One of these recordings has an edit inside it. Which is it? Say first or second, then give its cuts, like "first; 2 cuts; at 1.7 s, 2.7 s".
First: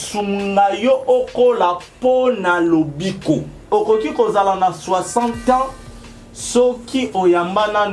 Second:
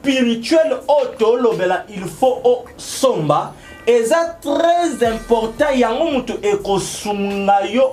first; 1 cut; at 3.7 s